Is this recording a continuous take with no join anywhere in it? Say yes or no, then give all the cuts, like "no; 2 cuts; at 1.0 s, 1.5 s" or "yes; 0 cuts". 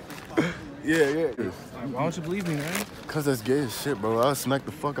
no; 1 cut; at 1.4 s